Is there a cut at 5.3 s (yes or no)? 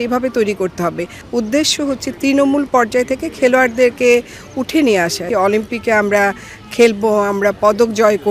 yes